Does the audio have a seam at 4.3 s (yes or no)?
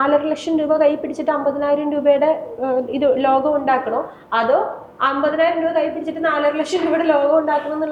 no